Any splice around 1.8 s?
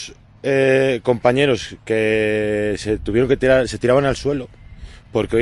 no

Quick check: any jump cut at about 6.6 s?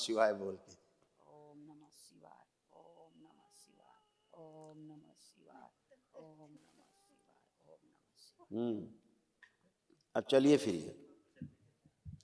no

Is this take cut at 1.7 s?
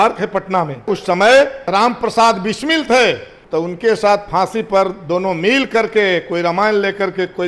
yes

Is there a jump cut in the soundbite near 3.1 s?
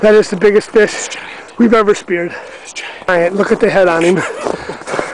yes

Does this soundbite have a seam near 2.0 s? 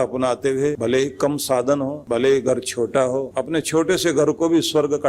yes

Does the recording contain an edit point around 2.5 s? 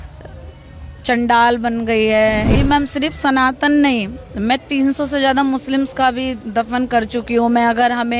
yes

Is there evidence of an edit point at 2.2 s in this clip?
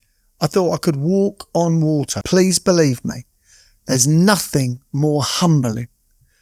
yes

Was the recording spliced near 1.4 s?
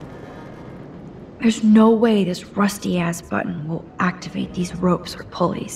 yes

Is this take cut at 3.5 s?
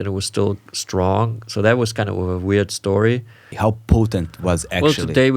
yes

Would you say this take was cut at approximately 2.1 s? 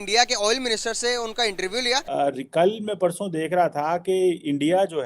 yes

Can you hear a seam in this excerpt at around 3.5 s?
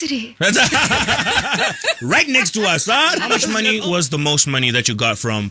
yes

